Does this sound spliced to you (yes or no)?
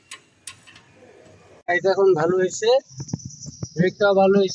yes